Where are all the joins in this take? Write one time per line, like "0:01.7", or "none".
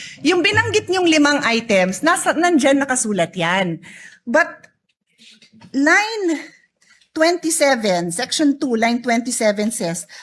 none